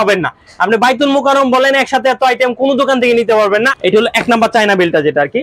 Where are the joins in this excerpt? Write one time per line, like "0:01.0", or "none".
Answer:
0:03.7